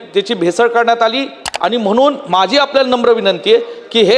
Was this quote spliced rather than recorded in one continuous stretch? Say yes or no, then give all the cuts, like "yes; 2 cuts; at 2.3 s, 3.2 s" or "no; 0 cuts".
yes; 1 cut; at 1.4 s